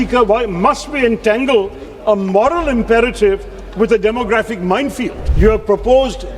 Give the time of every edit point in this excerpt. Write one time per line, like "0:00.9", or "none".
0:05.2